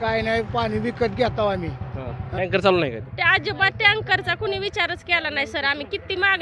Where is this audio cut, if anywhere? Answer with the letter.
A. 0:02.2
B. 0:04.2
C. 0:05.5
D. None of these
A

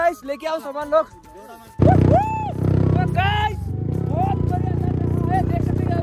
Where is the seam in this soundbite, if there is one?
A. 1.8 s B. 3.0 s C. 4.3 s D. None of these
A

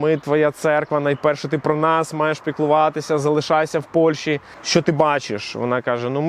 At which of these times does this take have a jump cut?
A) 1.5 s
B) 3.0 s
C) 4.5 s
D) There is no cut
C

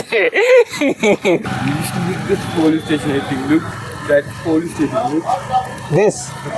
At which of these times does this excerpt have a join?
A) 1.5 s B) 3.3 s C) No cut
A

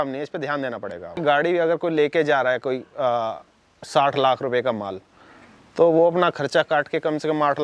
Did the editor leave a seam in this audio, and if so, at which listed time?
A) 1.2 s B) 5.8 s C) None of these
A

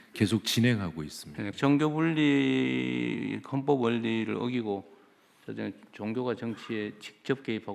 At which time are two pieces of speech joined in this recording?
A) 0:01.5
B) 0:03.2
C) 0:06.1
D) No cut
A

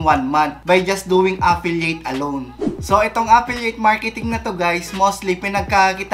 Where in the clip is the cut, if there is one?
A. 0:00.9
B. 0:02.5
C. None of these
C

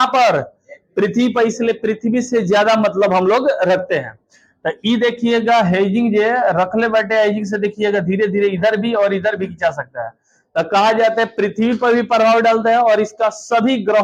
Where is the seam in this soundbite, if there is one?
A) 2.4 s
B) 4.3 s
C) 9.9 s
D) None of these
D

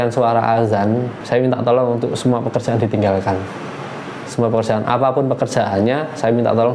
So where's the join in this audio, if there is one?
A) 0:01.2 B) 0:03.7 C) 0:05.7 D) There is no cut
A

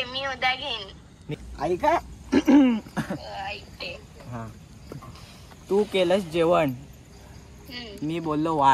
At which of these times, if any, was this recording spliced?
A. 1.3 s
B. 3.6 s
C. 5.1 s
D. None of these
A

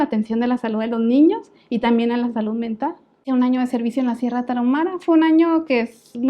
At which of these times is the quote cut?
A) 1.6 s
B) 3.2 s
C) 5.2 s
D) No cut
B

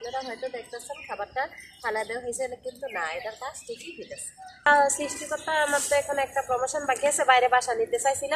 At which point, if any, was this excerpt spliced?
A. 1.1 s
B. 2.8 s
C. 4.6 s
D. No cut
C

